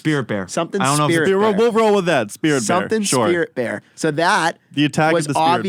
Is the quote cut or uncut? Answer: uncut